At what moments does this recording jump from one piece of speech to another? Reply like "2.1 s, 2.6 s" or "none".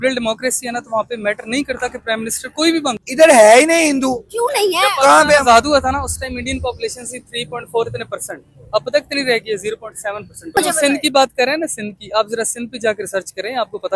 3.0 s, 10.6 s

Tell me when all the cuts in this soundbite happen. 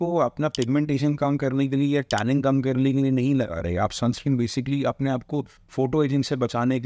none

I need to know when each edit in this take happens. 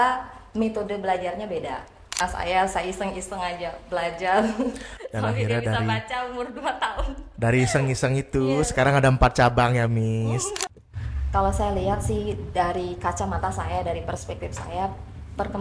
2.2 s, 10.6 s

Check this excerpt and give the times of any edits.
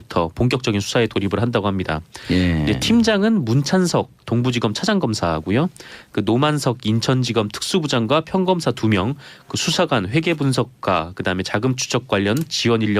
11.2 s

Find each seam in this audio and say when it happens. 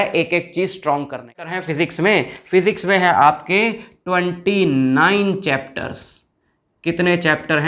1.6 s

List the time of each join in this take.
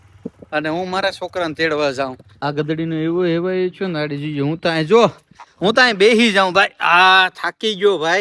2.2 s

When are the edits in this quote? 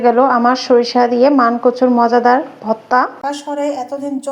2.9 s

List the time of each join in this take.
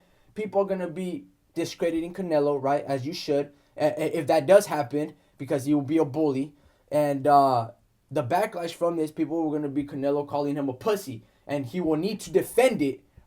none

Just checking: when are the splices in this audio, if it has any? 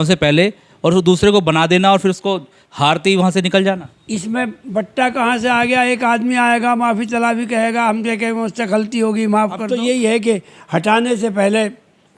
9.7 s

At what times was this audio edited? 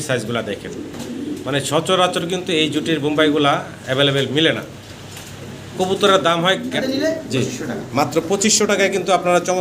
6.8 s

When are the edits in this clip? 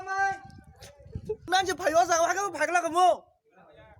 1.5 s

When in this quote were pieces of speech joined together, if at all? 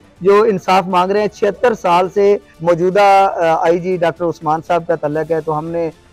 2.5 s

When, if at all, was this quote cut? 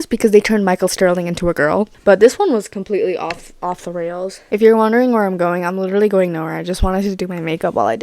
1.9 s, 4.4 s

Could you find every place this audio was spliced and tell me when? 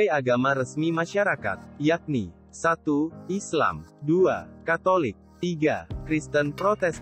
none

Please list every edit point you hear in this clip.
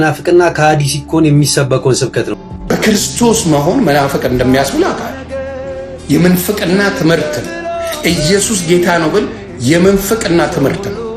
2.3 s

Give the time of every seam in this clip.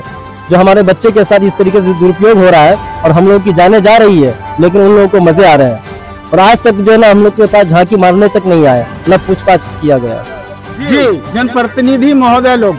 11.3 s

